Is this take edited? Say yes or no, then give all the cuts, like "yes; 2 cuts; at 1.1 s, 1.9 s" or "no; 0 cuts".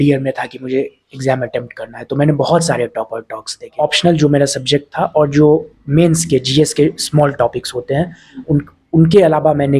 yes; 1 cut; at 3.7 s